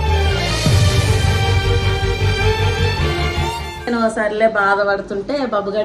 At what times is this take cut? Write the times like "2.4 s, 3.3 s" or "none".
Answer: 3.9 s